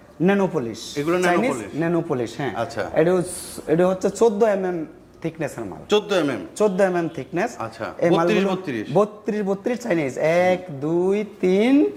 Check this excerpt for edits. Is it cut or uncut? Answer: uncut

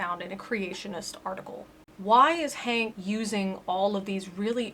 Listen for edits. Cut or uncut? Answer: cut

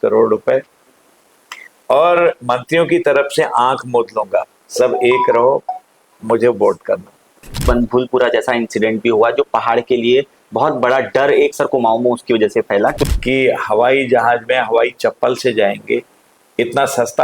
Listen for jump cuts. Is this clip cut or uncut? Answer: cut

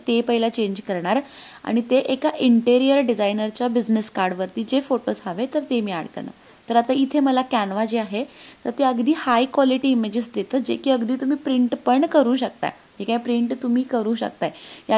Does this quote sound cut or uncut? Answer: uncut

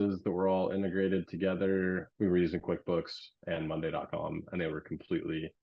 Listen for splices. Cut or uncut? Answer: cut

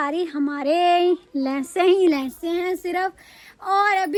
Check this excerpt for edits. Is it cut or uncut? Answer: uncut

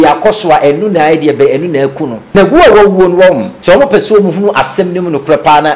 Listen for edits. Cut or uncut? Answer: cut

